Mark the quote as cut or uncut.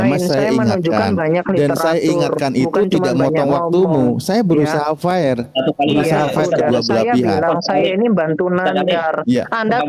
uncut